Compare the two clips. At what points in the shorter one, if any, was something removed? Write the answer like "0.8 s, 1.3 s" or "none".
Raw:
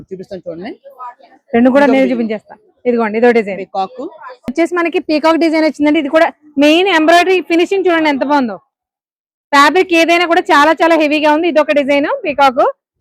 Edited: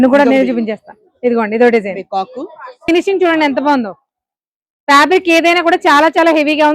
2.8 s

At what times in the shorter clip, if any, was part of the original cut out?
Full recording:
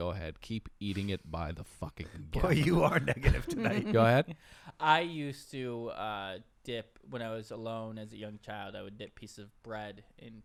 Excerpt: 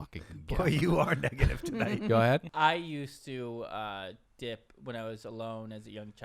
2.5 s

